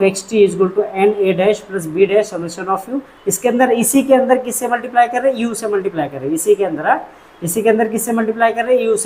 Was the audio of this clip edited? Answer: no; 0 cuts

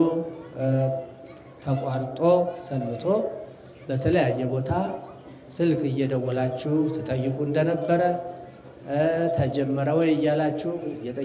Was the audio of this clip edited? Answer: no; 0 cuts

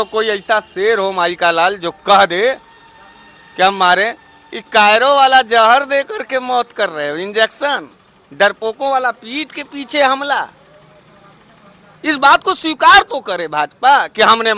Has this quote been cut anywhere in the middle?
no; 0 cuts

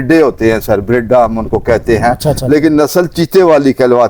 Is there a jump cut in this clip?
no; 0 cuts

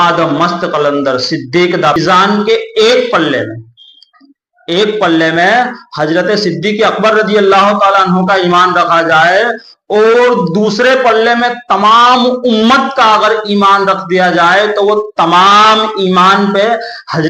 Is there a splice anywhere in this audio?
yes; 1 cut; at 2.0 s

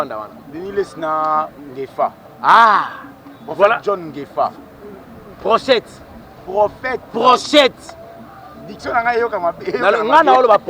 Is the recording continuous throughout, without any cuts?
yes; 0 cuts

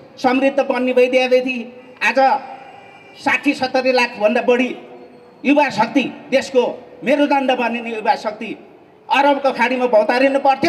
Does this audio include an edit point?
no; 0 cuts

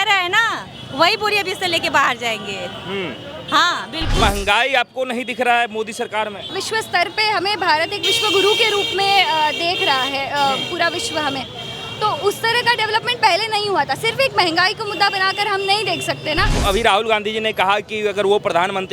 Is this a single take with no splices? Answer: no; 3 cuts; at 4.2 s, 6.5 s, 16.6 s

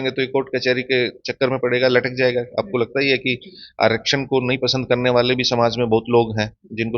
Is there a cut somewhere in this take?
no; 0 cuts

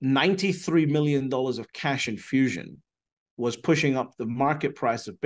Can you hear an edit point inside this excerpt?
no; 0 cuts

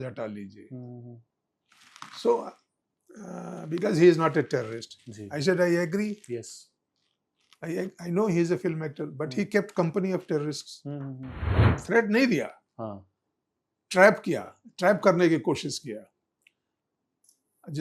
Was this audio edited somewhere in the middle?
yes; 1 cut; at 11.7 s

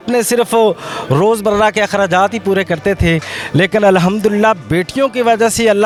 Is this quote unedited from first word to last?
yes; 0 cuts

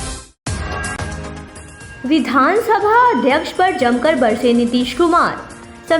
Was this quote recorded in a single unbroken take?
no; 1 cut; at 1.1 s

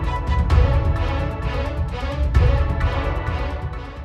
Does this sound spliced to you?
yes; 1 cut; at 1.8 s

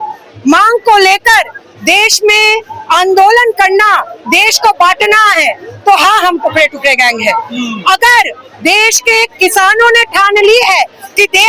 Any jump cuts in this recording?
no; 0 cuts

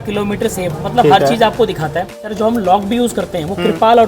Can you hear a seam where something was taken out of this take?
yes; 1 cut; at 2.3 s

